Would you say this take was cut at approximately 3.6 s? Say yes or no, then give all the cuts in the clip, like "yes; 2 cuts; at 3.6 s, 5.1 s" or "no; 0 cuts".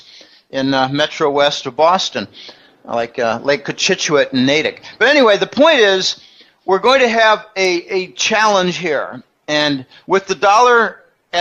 no; 0 cuts